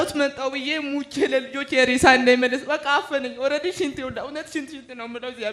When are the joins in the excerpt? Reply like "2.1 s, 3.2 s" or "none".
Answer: none